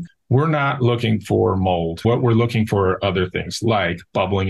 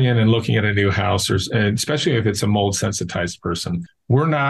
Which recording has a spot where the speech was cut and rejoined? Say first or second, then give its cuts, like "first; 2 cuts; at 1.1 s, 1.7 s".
first; 1 cut; at 2.0 s